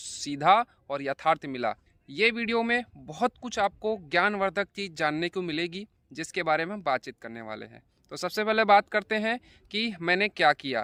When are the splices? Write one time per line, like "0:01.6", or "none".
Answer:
none